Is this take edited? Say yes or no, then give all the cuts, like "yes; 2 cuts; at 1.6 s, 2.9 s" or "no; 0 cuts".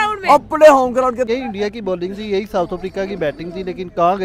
yes; 1 cut; at 1.3 s